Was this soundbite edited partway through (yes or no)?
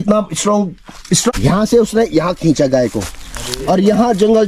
yes